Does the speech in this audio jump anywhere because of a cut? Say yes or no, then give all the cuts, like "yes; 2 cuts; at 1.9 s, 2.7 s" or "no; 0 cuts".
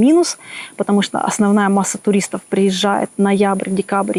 no; 0 cuts